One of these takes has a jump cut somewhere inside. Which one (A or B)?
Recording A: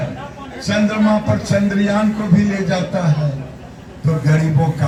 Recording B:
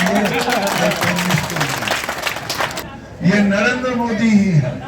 B